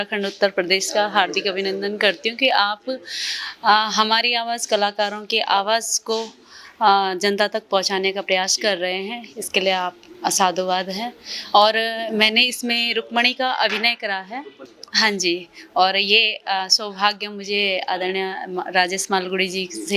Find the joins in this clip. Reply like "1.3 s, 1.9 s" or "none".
none